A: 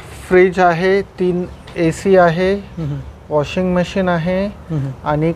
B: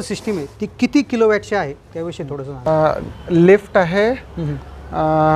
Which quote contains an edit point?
B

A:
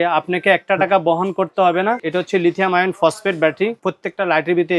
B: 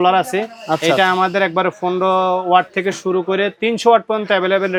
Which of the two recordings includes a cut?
A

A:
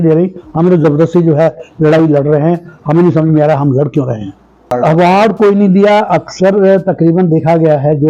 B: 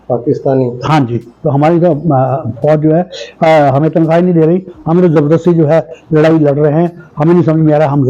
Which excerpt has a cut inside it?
A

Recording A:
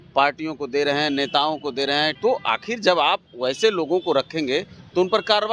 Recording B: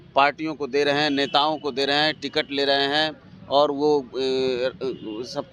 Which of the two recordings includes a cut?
A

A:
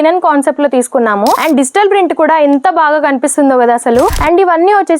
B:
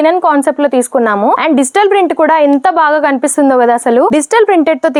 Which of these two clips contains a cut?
A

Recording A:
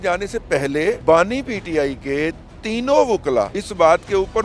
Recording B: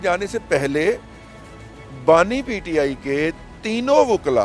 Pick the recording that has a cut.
A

